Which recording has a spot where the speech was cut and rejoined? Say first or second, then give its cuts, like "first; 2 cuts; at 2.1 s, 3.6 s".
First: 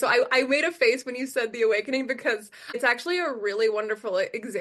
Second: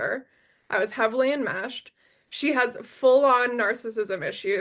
first; 1 cut; at 2.8 s